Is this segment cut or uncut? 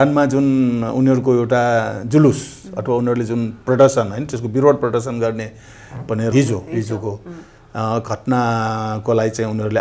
cut